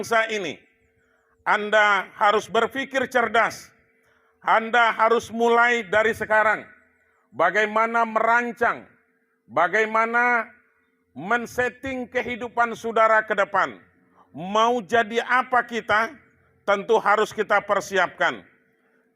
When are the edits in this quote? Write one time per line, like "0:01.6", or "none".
0:02.5

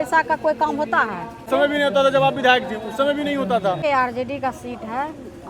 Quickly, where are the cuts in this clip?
0:01.5
0:03.8

